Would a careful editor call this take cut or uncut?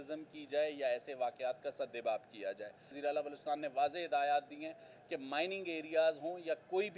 cut